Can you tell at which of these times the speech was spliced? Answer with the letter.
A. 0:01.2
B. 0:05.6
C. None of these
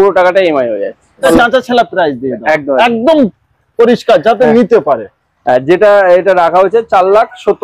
A